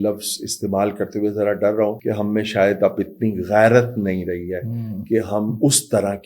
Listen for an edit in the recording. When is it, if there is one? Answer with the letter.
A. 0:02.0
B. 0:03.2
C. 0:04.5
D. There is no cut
A